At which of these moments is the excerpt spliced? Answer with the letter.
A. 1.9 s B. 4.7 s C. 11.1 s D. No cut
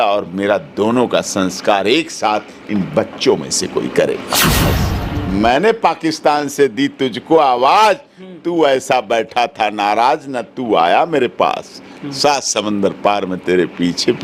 B